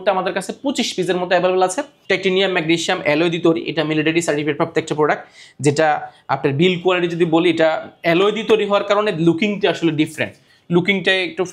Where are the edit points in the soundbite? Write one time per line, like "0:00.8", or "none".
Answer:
0:01.9